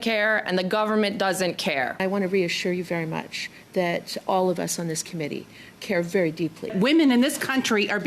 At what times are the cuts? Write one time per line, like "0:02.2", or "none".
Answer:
0:02.0
0:06.7